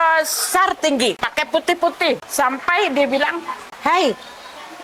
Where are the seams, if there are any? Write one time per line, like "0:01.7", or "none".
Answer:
0:01.2
0:02.3
0:03.6

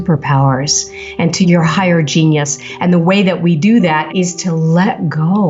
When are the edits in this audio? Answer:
0:01.4
0:04.1

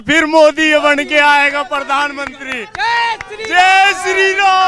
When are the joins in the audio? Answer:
none

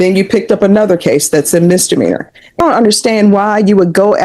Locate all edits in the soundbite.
0:02.6

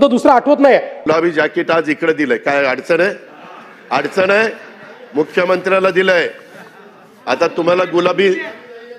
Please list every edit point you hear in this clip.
0:01.1

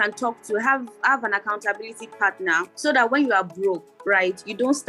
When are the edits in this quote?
0:02.7

